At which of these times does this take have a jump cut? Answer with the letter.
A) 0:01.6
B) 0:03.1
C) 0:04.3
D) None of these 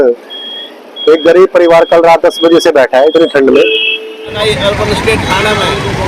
C